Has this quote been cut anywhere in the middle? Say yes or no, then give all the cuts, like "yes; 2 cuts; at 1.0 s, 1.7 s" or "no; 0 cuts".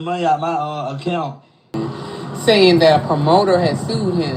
yes; 1 cut; at 1.8 s